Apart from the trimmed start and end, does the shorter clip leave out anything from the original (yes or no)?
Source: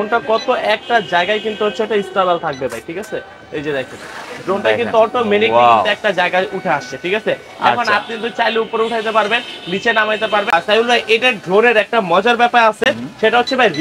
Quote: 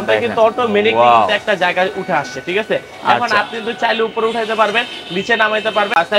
no